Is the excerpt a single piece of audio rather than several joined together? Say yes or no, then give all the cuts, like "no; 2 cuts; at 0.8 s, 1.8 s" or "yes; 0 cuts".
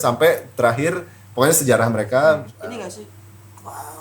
no; 1 cut; at 2.5 s